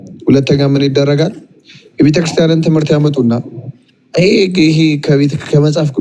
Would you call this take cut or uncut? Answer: uncut